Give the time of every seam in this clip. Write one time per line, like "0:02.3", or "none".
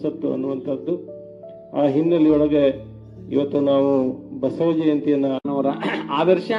0:05.4